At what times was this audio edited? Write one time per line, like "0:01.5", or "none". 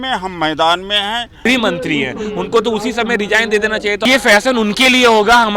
0:01.4
0:04.0